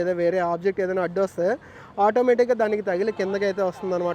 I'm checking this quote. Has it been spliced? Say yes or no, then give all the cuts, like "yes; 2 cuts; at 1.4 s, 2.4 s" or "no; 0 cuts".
no; 0 cuts